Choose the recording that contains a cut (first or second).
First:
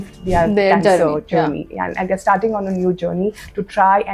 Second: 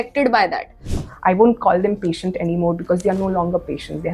second